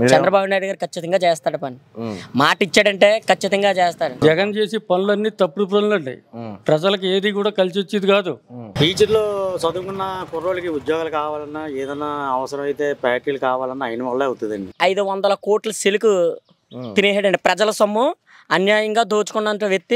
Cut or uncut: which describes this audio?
cut